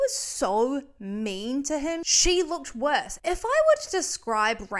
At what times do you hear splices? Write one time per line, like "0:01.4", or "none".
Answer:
0:02.1
0:03.1